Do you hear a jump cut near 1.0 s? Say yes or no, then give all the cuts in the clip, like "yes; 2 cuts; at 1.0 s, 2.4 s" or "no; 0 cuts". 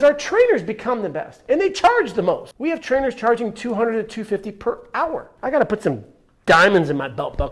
no; 2 cuts; at 2.5 s, 5.3 s